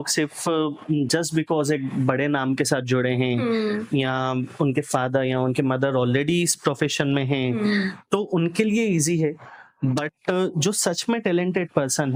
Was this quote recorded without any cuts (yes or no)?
yes